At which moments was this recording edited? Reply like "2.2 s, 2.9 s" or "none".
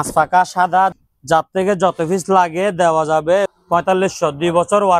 0.9 s, 3.5 s